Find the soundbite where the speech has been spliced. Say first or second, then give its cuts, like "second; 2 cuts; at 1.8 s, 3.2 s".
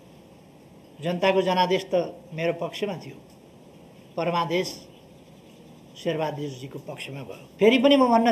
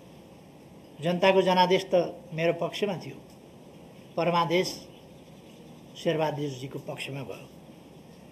first; 1 cut; at 7.4 s